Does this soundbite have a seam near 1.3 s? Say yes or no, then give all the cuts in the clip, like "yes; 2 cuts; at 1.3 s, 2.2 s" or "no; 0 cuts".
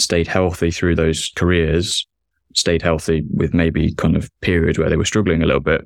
yes; 1 cut; at 1.3 s